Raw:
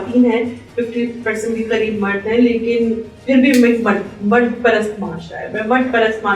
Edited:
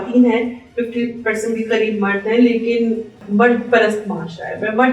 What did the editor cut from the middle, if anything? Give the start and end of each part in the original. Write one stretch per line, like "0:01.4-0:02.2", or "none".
0:03.2-0:04.1